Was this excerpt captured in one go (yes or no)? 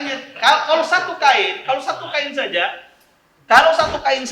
yes